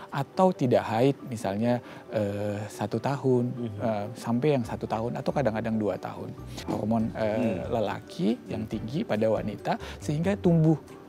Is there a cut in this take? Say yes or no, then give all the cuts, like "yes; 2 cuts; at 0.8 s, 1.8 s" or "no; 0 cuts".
yes; 1 cut; at 6.6 s